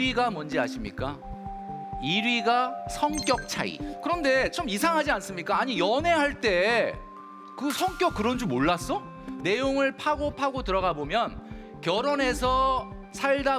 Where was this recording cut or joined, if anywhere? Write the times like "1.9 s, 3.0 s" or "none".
3.9 s, 9.3 s